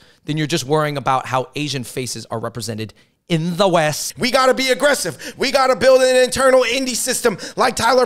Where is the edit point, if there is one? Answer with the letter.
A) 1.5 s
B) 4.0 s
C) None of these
B